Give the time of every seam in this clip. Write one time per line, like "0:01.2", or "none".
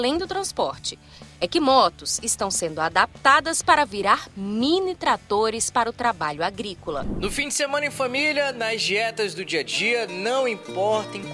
0:07.1